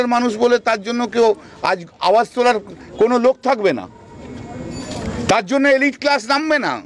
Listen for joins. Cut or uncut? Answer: cut